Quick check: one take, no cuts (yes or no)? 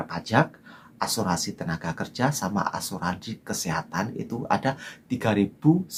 yes